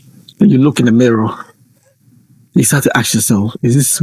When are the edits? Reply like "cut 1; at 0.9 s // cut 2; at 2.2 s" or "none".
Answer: none